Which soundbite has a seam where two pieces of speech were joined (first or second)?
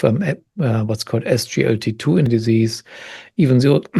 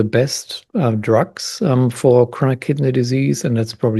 first